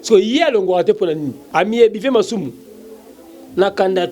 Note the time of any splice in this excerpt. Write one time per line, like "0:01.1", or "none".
0:01.4